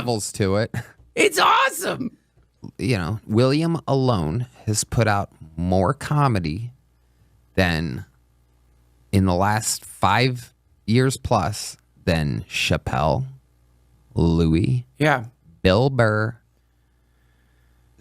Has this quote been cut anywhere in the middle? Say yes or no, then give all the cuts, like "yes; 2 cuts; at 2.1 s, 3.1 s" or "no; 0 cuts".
yes; 1 cut; at 2.2 s